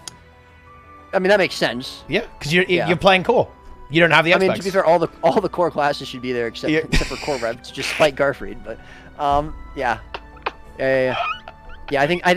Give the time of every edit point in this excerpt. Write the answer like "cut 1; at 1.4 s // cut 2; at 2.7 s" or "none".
none